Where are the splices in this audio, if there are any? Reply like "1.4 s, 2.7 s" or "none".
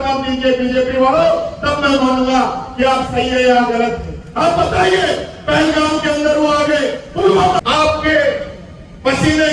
7.6 s